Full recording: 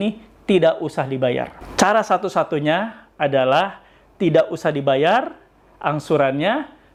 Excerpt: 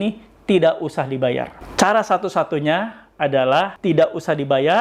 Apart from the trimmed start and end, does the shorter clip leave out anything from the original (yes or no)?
yes